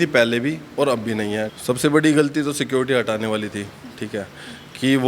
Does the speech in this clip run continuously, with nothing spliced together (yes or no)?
no